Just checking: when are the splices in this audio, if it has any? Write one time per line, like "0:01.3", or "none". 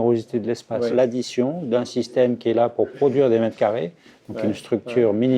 0:00.9